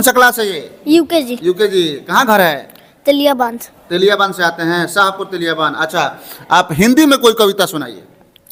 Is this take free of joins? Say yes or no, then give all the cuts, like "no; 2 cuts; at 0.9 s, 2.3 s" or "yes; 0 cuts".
yes; 0 cuts